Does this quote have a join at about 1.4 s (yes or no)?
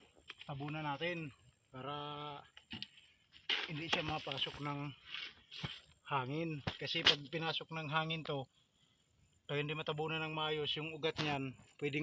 no